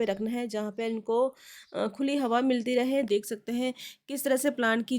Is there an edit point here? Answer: yes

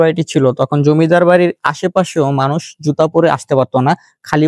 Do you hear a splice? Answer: no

